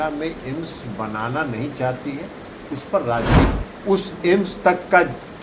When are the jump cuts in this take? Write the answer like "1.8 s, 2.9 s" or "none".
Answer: 3.5 s